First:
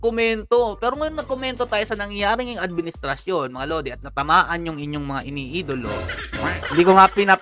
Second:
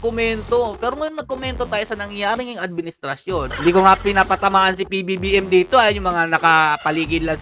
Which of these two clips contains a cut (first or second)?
second